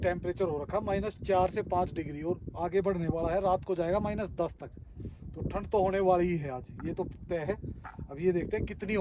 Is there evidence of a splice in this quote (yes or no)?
no